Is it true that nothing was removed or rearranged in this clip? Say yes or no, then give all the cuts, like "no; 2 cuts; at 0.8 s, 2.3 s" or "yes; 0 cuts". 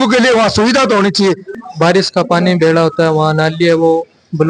no; 1 cut; at 1.5 s